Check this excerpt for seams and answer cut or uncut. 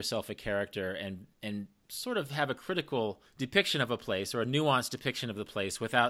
cut